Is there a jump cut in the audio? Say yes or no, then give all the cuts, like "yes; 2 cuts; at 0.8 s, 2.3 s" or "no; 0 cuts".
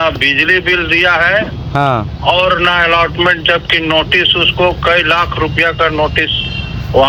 no; 0 cuts